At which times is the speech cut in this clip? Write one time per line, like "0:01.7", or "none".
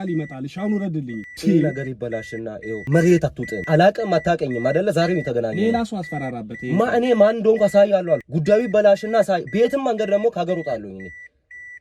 0:01.2
0:02.8
0:03.6
0:08.3